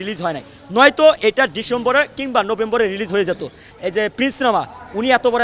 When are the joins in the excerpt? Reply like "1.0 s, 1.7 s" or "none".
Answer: 3.7 s